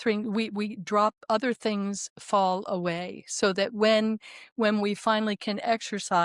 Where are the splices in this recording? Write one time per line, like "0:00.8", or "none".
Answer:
none